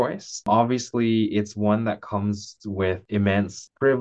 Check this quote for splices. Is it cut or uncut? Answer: cut